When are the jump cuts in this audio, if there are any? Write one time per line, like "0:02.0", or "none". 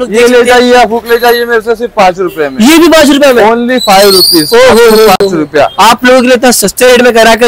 none